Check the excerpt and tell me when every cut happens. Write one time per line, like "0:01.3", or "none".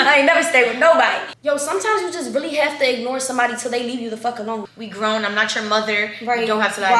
0:01.3
0:04.7

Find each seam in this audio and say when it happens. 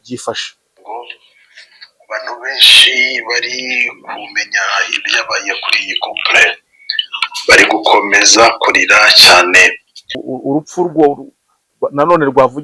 0:10.2

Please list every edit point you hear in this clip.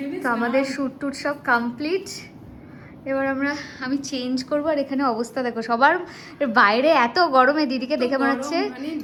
none

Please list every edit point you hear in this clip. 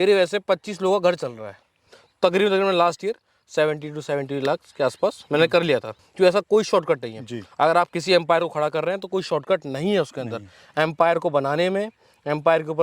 0:01.8
0:06.0

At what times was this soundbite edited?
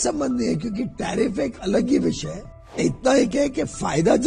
0:02.8

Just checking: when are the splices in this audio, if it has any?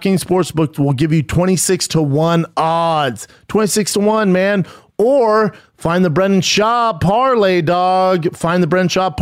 none

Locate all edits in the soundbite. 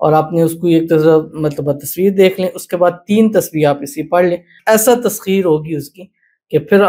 0:04.6

